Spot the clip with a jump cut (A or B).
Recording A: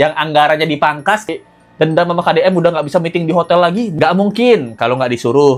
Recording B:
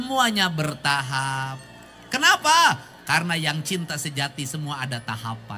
A